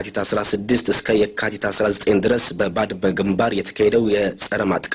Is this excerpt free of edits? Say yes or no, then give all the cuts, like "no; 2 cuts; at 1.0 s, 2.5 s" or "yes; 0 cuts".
yes; 0 cuts